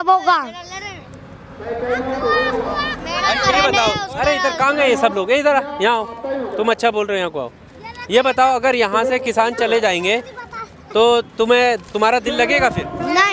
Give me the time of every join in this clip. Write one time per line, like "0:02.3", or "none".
none